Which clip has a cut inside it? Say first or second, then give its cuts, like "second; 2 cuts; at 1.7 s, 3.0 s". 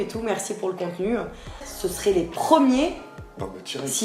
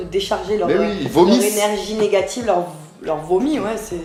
first; 1 cut; at 1.7 s